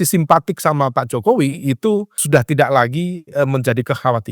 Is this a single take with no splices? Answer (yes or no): no